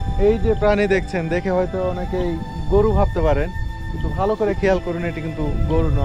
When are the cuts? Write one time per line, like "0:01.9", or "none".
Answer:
none